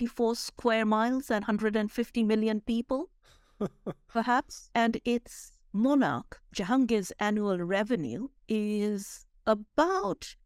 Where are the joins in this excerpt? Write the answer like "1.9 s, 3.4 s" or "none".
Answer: none